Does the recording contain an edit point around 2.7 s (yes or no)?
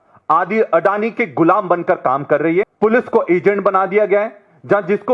yes